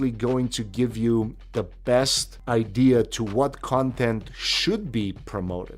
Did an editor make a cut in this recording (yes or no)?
yes